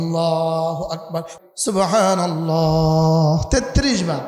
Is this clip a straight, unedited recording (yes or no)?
no